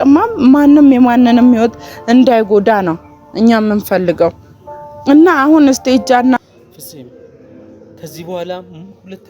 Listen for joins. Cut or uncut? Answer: cut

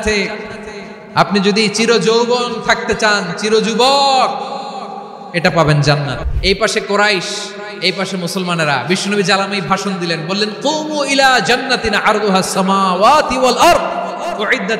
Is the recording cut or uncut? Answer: cut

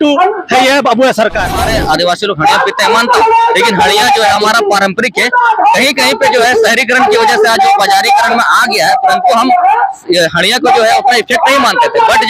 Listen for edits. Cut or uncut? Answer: cut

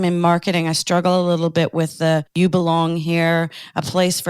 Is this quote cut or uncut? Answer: cut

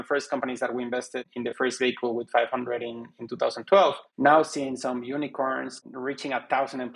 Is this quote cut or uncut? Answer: cut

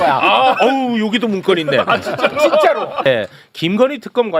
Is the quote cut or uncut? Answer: cut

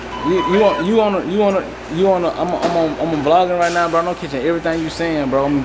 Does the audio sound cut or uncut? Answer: uncut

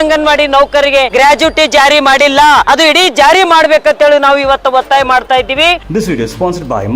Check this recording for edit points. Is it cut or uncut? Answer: cut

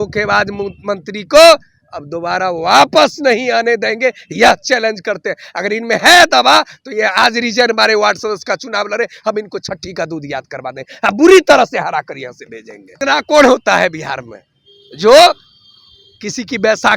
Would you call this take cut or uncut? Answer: cut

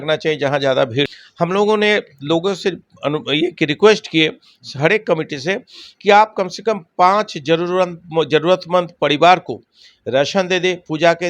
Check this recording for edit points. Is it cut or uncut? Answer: cut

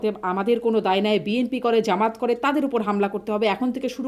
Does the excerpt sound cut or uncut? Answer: uncut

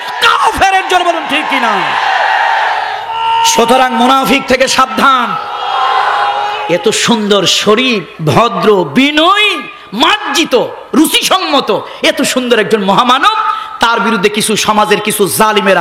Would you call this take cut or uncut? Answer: cut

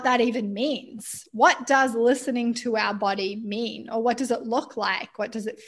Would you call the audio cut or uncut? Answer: uncut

